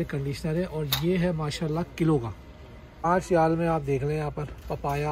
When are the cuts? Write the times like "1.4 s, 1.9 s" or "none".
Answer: 3.0 s